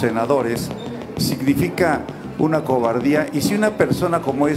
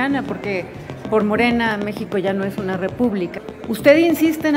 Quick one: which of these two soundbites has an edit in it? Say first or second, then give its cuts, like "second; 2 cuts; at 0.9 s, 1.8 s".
second; 1 cut; at 3.4 s